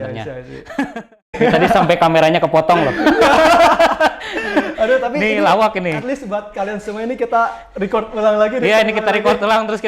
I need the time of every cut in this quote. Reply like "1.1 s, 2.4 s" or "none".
1.4 s